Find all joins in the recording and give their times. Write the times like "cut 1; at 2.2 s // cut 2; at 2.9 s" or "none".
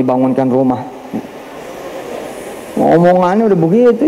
none